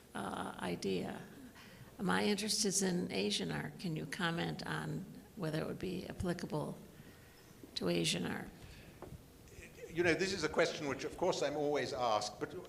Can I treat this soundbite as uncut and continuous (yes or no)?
yes